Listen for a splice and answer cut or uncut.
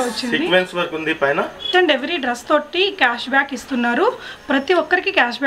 cut